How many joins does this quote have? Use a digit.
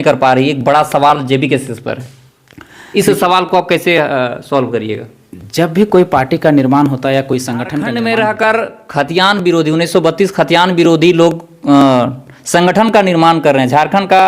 1